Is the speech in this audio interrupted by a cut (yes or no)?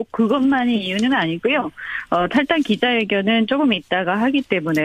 no